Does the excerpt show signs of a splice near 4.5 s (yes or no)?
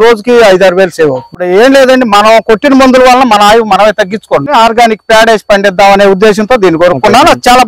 yes